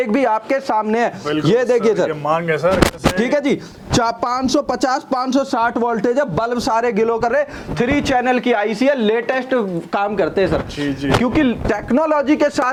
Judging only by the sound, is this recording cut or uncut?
uncut